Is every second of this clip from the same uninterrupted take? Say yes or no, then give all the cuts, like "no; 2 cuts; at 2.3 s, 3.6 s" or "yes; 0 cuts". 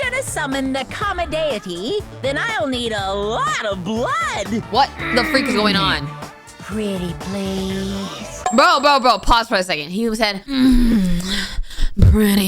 no; 3 cuts; at 4.7 s, 8.5 s, 10.4 s